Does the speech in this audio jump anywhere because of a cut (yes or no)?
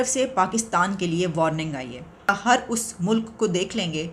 yes